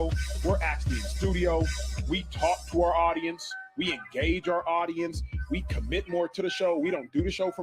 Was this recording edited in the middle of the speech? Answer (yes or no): yes